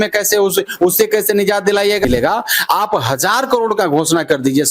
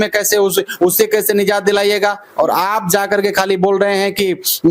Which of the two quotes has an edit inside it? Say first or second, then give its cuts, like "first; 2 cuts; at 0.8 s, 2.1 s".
first; 1 cut; at 2.0 s